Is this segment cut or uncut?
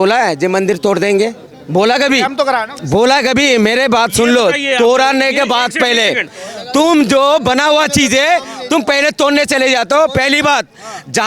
uncut